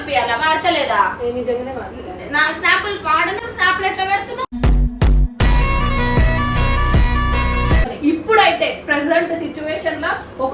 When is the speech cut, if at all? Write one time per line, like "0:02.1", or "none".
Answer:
0:07.9